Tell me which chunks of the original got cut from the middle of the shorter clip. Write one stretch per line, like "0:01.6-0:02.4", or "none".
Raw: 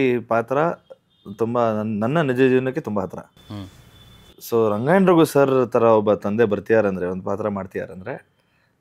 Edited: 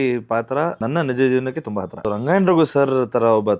0:00.8-0:02.0
0:03.3-0:04.7